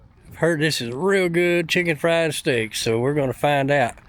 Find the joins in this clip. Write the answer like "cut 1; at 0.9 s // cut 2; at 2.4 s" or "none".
none